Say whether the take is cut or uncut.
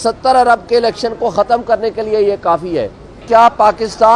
cut